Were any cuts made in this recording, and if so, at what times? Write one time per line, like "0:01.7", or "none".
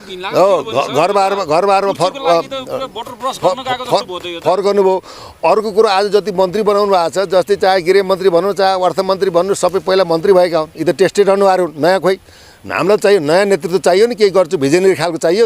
none

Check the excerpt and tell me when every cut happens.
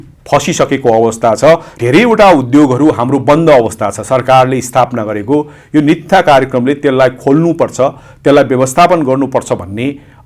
0:01.7

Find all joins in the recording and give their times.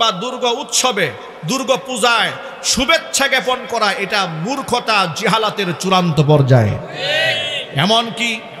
none

